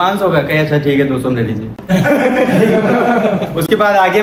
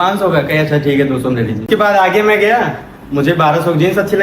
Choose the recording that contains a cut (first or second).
second